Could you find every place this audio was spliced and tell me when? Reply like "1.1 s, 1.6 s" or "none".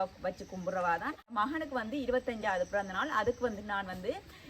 1.3 s

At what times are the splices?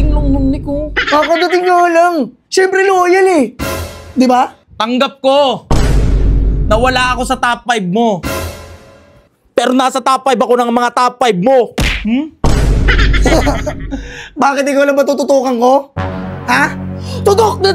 none

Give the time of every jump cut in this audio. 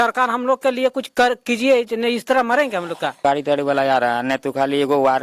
3.2 s

